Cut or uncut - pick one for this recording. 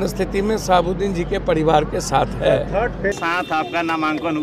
cut